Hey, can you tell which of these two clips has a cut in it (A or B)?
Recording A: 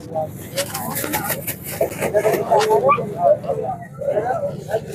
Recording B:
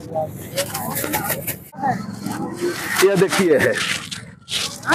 B